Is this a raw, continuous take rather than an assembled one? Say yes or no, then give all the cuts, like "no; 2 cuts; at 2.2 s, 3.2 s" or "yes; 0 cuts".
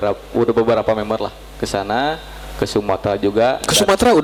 yes; 0 cuts